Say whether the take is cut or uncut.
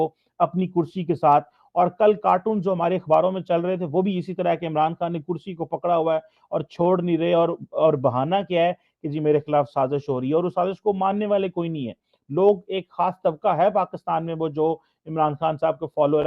uncut